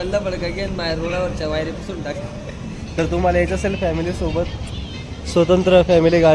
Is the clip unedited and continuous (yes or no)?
no